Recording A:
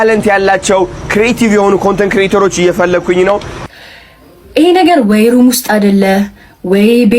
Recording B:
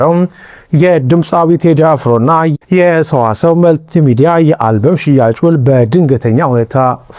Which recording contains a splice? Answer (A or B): A